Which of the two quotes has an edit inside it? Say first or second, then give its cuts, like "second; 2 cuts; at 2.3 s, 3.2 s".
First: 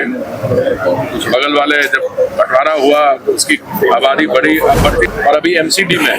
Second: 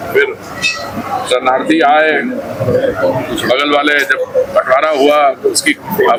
first; 1 cut; at 5.1 s